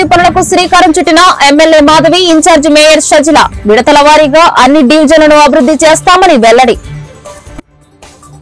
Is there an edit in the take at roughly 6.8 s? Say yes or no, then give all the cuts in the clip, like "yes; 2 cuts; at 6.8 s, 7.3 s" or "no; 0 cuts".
yes; 1 cut; at 6.8 s